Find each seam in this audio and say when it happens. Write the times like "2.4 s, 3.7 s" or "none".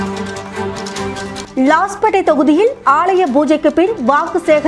0.9 s